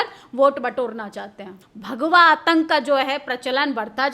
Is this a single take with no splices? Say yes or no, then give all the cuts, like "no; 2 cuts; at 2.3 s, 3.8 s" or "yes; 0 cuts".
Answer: no; 1 cut; at 1.6 s